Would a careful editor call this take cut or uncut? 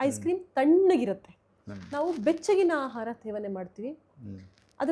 uncut